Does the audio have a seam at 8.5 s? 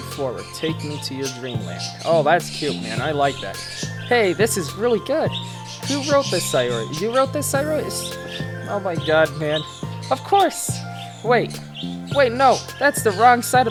no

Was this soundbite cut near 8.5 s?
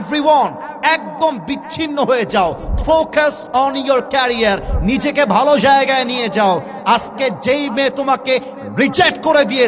no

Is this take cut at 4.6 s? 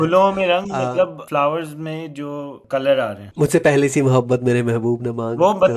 no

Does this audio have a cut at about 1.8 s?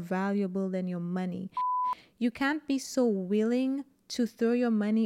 yes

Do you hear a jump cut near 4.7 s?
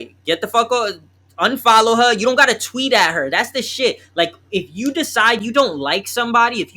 no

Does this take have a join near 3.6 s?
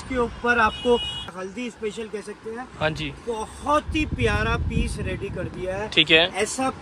no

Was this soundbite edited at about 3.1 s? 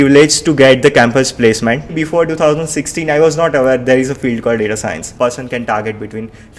no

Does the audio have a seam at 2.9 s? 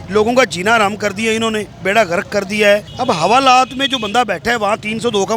yes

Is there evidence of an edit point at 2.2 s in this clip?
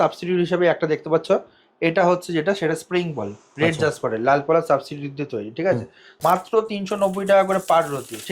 no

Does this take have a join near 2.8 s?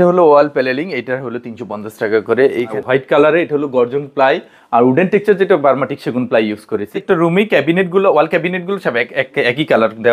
yes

